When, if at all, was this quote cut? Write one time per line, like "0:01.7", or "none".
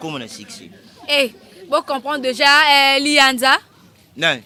none